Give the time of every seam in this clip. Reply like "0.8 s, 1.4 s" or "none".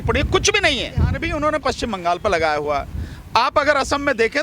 1.2 s